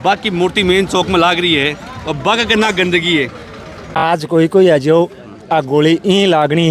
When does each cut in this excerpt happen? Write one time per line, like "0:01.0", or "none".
0:04.0